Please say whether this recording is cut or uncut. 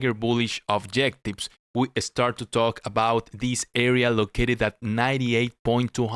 uncut